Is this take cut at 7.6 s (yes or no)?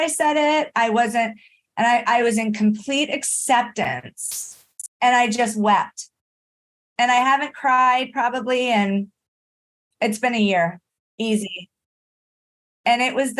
no